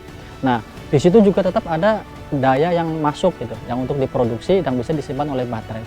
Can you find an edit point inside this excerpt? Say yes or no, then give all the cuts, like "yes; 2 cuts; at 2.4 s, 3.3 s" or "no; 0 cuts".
yes; 1 cut; at 2.2 s